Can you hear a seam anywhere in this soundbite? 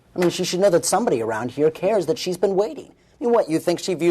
no; 0 cuts

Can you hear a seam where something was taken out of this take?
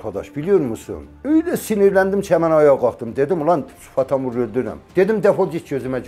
yes; 1 cut; at 4.8 s

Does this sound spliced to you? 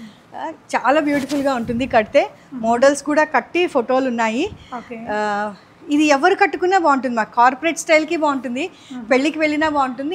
no; 0 cuts

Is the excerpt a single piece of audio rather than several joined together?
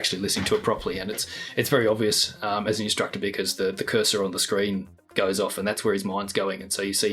yes; 0 cuts

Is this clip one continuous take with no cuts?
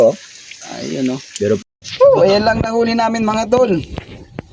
no; 1 cut; at 1.6 s

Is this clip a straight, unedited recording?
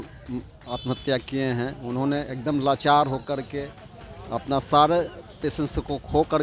yes; 0 cuts

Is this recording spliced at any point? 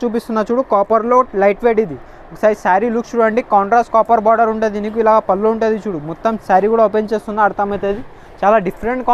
no; 0 cuts

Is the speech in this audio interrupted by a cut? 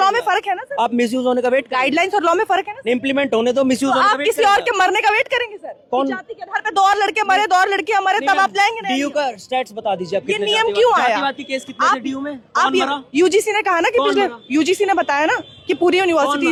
no; 0 cuts

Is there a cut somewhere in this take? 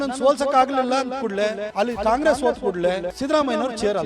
yes; 2 cuts; at 1.6 s, 3.1 s

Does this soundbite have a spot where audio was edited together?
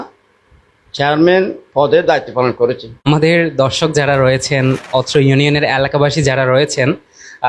yes; 1 cut; at 3.0 s

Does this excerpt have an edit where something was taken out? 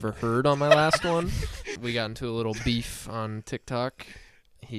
yes; 1 cut; at 1.7 s

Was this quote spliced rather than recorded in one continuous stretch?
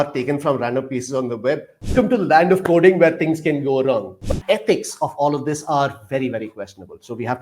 yes; 2 cuts; at 1.9 s, 4.3 s

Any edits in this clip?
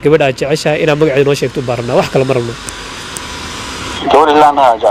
yes; 1 cut; at 4.0 s

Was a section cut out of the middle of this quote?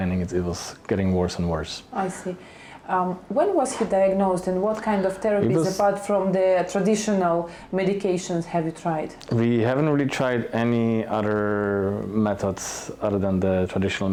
no; 0 cuts

